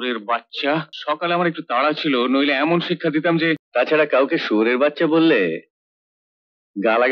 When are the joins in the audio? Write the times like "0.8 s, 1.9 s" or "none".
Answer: 0.9 s, 3.6 s